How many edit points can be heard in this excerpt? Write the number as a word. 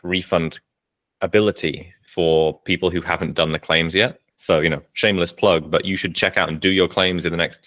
one